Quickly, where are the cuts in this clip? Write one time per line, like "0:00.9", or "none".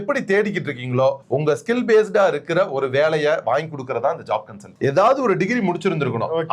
0:04.7